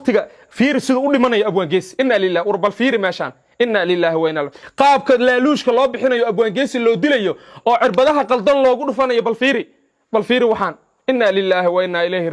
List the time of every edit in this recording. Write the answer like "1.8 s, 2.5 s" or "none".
4.6 s

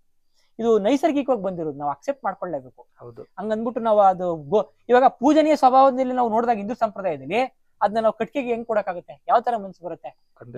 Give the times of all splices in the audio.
none

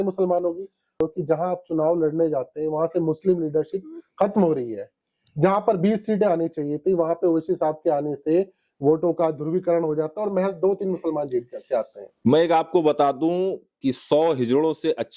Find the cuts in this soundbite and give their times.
1.0 s

